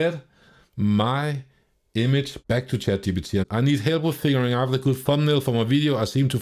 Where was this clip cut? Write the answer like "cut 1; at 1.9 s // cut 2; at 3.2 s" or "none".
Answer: cut 1; at 2.4 s // cut 2; at 3.4 s